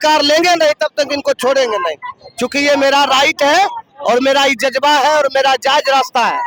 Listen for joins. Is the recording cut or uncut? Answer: uncut